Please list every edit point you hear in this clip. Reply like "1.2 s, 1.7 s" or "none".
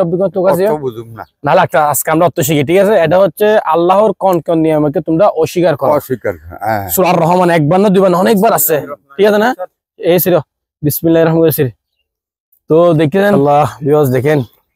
13.3 s